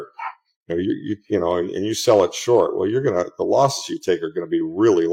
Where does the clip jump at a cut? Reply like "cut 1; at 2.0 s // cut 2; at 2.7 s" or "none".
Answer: none